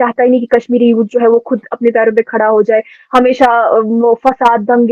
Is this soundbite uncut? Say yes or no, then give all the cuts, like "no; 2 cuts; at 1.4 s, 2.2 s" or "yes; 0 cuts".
yes; 0 cuts